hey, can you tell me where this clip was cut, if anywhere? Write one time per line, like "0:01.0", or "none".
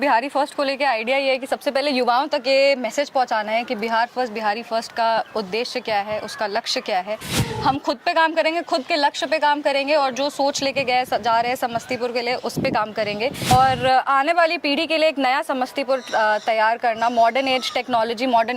0:07.4
0:13.5